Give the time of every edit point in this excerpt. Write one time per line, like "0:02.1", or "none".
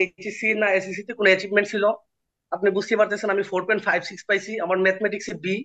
none

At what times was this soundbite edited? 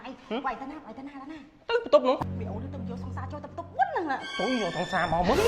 0:02.2

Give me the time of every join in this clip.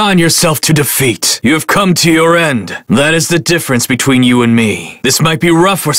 0:02.8

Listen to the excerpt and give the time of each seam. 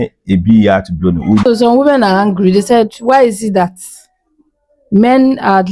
0:01.4

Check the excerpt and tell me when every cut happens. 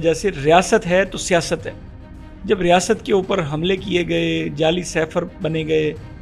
none

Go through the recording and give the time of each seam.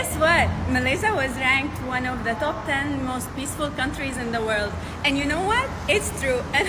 none

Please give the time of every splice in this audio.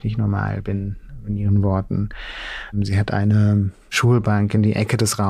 0:02.7
0:03.9

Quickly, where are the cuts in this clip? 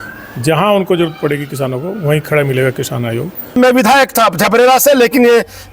0:03.6

